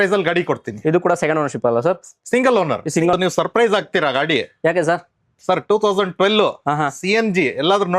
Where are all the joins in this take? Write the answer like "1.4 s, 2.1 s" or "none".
3.2 s